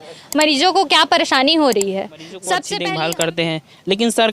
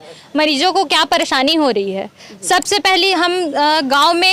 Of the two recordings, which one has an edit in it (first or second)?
first